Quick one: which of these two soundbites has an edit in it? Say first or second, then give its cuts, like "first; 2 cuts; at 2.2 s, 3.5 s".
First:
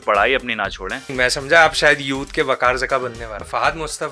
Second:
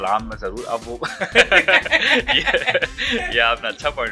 first; 2 cuts; at 1.1 s, 3.4 s